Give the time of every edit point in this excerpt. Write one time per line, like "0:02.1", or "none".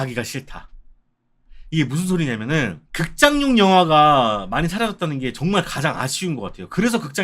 0:02.8